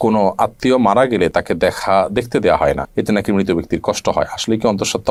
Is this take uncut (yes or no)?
yes